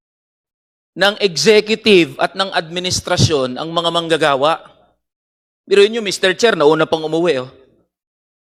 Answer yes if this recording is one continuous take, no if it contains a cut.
yes